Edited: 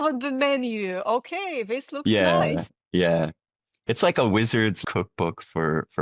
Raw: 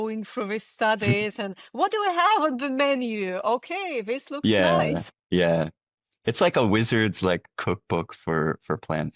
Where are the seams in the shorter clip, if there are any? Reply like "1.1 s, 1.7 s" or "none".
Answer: 4.8 s